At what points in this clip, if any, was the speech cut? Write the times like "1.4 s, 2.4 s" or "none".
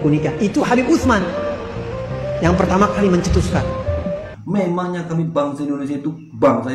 4.3 s